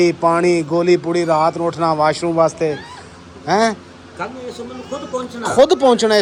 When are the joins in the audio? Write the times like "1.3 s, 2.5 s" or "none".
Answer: none